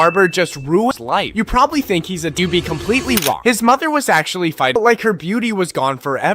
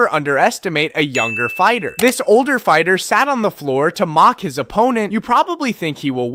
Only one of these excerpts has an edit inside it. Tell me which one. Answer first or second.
first